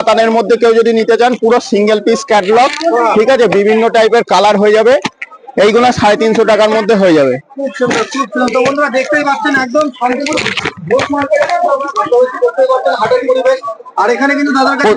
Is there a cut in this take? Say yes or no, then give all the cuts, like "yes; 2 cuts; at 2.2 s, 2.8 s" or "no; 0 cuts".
no; 0 cuts